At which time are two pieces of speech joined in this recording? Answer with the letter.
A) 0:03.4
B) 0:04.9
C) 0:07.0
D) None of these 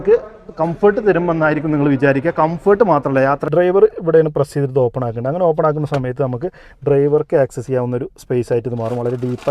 A